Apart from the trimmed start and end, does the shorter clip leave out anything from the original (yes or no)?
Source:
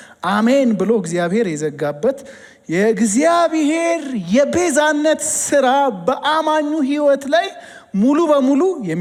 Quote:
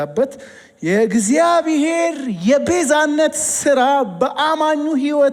no